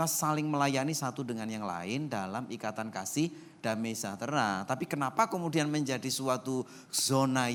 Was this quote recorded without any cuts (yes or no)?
yes